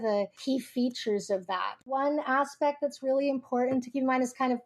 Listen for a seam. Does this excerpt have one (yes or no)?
yes